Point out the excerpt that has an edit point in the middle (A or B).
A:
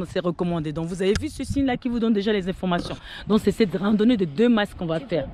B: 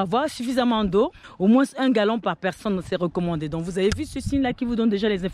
B